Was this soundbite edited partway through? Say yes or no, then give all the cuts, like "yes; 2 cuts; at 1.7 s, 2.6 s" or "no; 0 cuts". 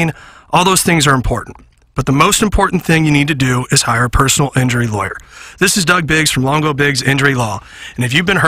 no; 0 cuts